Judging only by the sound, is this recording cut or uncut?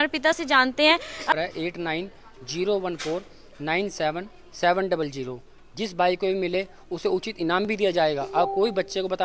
cut